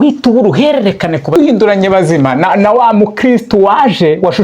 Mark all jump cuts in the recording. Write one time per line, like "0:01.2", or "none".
0:01.4